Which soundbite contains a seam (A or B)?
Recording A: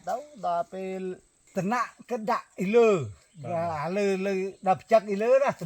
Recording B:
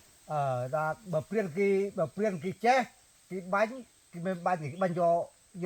A